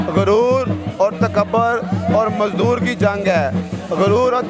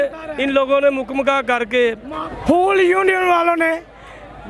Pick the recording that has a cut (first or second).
second